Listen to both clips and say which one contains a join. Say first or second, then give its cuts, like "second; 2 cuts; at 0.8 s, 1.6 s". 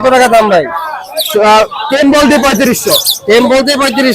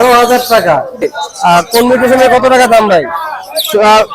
second; 1 cut; at 1.2 s